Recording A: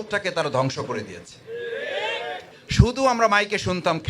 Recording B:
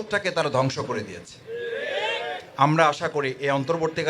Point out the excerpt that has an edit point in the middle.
A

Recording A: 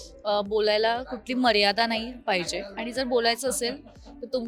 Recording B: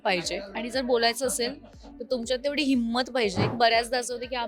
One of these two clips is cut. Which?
B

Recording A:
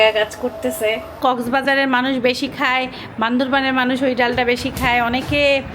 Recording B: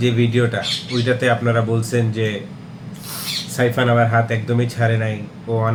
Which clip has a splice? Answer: A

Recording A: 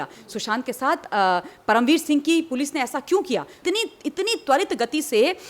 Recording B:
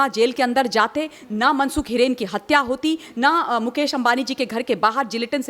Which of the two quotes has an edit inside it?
A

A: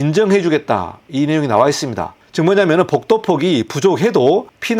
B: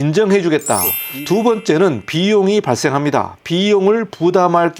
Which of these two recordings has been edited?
B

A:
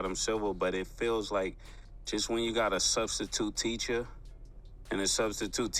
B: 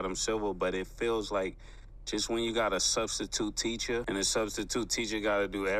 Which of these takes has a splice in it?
B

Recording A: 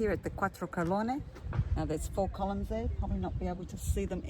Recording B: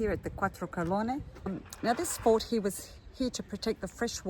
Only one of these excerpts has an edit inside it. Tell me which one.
B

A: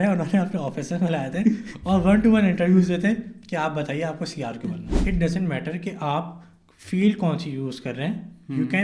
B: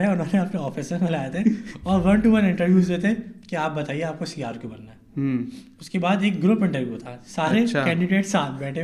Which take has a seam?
A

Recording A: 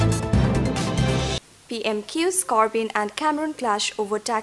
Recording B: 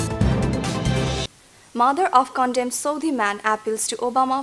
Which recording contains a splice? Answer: B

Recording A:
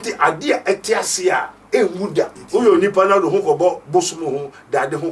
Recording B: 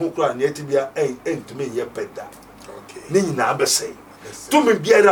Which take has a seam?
A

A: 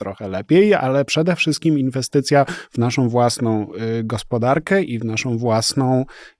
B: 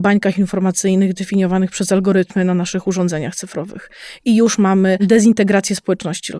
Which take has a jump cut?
B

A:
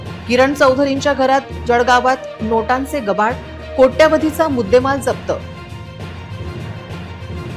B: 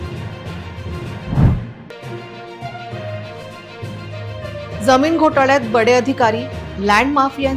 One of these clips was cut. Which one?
B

